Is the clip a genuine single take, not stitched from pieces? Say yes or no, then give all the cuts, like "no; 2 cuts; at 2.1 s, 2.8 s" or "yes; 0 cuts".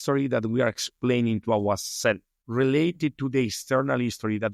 no; 1 cut; at 2.3 s